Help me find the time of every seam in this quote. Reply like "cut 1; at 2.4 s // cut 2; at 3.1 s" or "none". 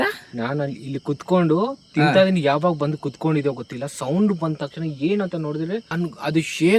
cut 1; at 5.9 s